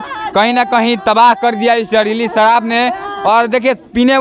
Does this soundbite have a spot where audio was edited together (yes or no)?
no